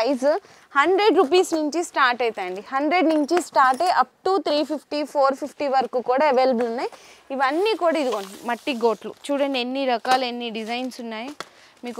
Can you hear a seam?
no; 0 cuts

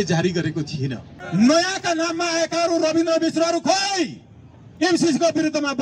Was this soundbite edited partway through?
yes; 1 cut; at 1.1 s

